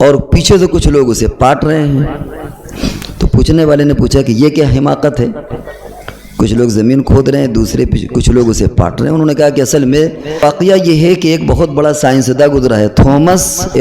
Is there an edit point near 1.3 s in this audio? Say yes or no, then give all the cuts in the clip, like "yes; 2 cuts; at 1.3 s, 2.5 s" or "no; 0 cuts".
no; 1 cut; at 10.4 s